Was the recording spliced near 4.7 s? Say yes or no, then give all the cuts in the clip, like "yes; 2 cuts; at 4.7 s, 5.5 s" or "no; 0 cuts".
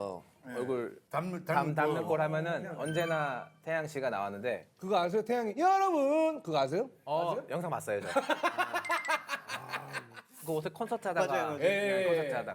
yes; 1 cut; at 4.7 s